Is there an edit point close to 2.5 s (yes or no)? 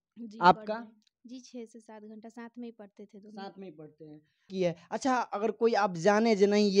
no